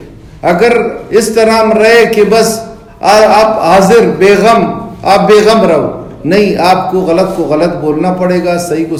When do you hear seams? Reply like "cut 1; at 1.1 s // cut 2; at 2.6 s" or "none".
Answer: none